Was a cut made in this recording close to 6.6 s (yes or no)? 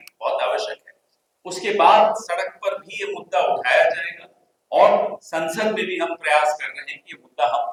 no